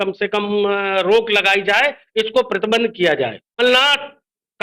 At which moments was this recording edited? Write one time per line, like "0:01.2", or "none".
0:03.6